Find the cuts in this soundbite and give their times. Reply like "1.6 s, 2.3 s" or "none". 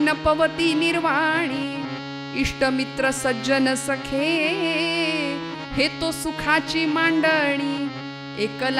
none